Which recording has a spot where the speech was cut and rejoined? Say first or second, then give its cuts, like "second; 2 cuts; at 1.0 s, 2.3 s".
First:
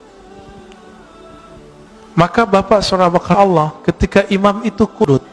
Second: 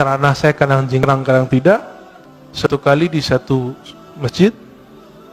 first; 1 cut; at 1.5 s